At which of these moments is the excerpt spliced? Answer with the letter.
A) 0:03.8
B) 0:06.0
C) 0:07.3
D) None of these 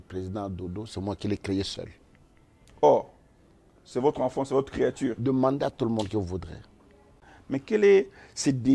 C